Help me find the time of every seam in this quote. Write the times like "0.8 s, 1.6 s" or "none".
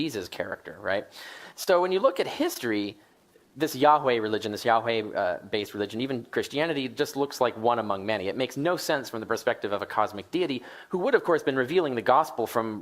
7.2 s